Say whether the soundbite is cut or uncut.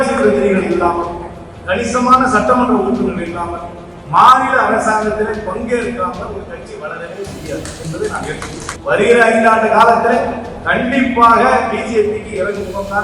cut